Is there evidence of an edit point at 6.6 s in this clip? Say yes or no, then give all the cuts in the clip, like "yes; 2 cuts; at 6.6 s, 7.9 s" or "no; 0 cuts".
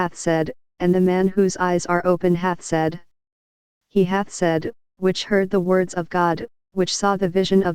yes; 1 cut; at 6.6 s